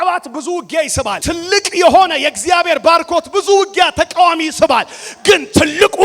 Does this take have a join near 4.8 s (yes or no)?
no